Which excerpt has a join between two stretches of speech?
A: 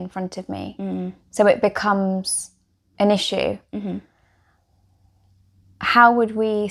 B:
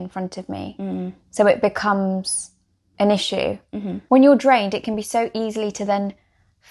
B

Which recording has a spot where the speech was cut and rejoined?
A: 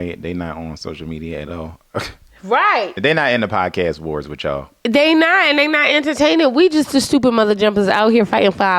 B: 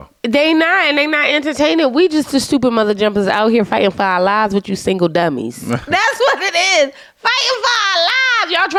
A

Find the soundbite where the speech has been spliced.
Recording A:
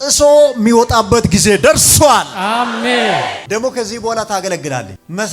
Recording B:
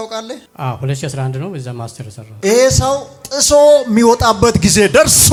A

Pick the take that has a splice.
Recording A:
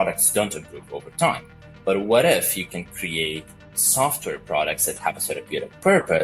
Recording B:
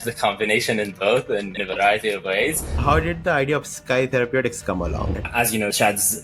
B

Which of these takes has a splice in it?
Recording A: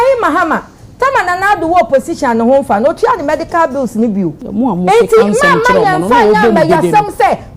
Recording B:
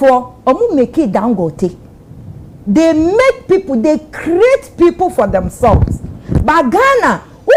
A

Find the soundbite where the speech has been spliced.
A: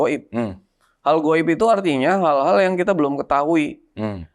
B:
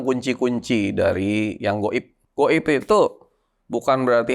B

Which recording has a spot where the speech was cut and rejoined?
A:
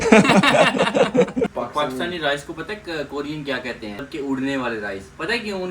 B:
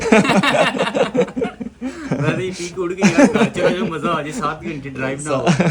A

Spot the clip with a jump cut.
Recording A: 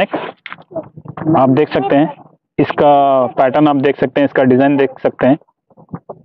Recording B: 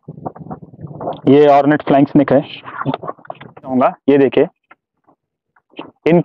B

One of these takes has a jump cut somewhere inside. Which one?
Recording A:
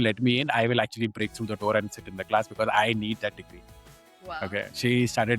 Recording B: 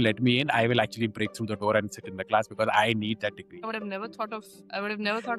B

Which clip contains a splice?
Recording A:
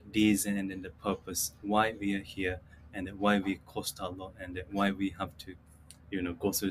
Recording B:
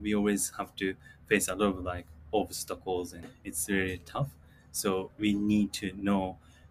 B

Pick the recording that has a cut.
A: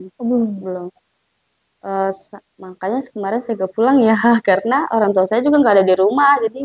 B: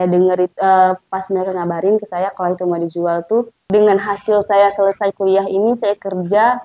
B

